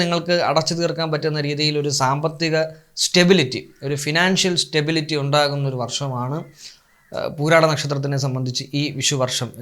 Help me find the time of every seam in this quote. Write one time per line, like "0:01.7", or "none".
none